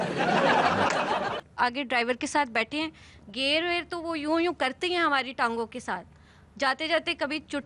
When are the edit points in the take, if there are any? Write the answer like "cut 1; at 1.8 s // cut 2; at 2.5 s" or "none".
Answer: cut 1; at 1.4 s